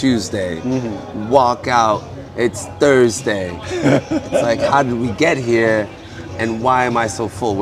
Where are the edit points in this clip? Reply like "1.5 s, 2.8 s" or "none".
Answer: none